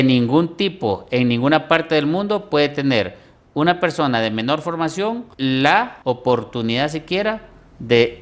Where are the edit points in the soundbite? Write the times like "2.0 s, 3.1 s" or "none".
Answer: 5.3 s, 5.9 s